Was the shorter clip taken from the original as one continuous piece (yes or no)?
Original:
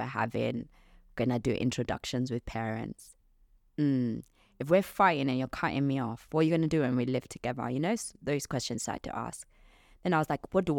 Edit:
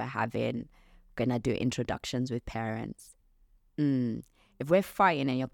yes